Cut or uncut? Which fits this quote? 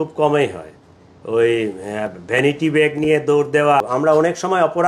cut